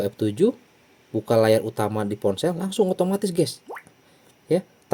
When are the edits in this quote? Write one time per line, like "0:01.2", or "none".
none